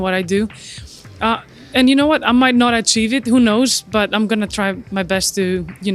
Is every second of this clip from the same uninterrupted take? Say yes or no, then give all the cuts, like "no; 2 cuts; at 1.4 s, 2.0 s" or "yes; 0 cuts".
yes; 0 cuts